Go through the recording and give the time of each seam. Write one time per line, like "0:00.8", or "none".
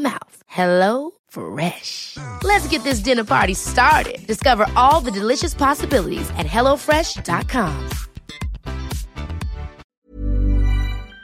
0:09.8